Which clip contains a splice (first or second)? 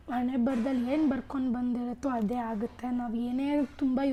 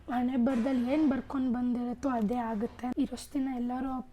second